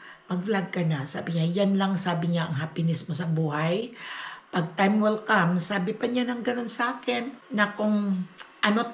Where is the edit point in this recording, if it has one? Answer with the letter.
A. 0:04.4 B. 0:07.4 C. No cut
B